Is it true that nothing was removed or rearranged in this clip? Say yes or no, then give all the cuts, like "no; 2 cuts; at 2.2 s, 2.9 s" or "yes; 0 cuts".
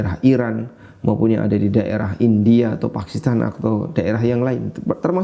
yes; 0 cuts